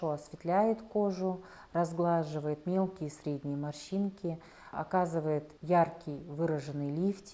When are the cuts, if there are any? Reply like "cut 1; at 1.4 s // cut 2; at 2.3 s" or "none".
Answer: cut 1; at 4.7 s // cut 2; at 5.5 s